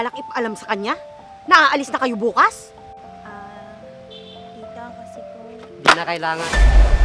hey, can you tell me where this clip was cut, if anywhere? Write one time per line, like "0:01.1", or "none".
none